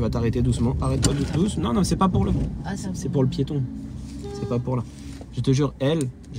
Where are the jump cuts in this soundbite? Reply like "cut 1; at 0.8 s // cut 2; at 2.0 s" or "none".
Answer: none